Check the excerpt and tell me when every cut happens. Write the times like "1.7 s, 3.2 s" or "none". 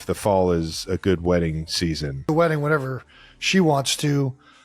2.2 s